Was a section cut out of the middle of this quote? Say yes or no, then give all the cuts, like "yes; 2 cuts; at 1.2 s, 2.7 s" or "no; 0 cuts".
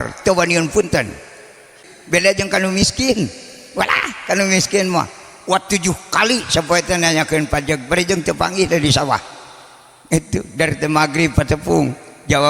yes; 1 cut; at 1.9 s